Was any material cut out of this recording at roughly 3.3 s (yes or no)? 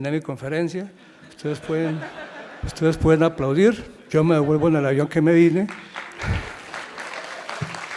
no